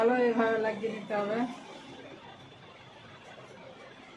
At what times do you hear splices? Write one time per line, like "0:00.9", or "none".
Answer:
0:02.2

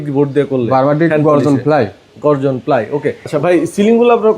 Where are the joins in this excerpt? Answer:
0:03.2

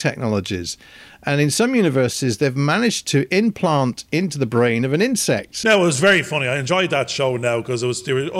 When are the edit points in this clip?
0:05.5

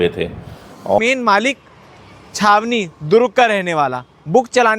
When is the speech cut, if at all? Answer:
0:00.9

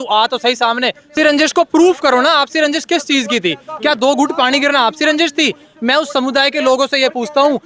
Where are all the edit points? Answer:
0:01.1

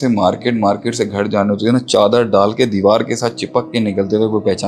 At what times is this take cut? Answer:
none

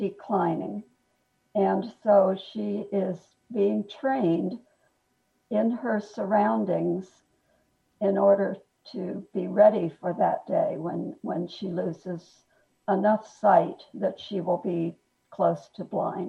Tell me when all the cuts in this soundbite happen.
none

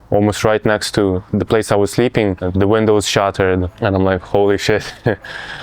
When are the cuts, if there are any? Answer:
0:02.4
0:03.7

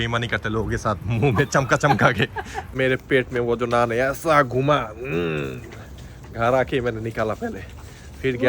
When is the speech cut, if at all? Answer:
0:02.7
0:05.7

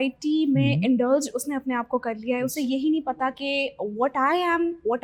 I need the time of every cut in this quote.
none

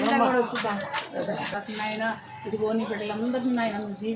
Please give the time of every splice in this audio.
0:01.5

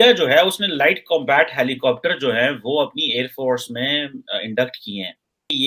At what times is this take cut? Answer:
none

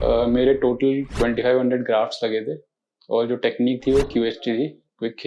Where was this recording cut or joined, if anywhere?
none

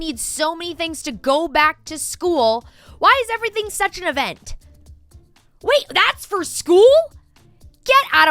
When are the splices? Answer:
none

